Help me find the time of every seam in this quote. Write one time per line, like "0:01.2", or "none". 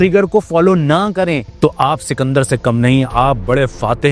0:01.5